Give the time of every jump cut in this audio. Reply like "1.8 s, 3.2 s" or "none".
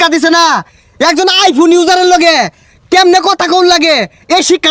none

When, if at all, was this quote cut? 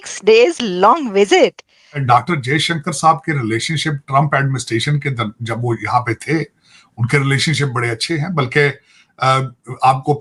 1.9 s

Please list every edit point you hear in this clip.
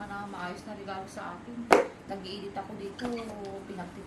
none

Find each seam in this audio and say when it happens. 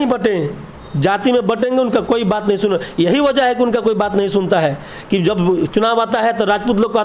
none

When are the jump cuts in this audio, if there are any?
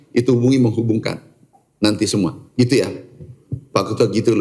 none

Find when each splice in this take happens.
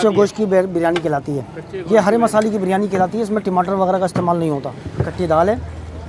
5.1 s

